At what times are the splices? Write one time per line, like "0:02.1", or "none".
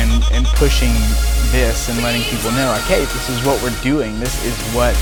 none